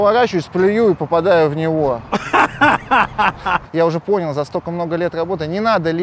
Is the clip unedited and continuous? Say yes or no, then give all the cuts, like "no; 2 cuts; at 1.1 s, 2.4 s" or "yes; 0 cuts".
no; 1 cut; at 3.6 s